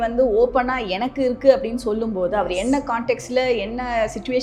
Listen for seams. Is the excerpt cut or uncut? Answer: uncut